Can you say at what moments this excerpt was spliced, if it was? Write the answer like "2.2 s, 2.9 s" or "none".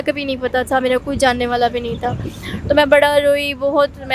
none